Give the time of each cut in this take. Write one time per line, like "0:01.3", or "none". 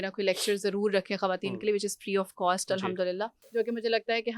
0:03.4